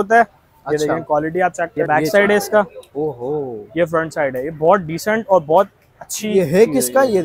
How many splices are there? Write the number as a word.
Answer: one